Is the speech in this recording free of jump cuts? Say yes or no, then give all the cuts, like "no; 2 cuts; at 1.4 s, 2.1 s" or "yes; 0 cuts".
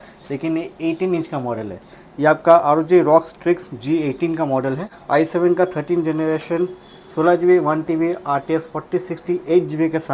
no; 1 cut; at 4.9 s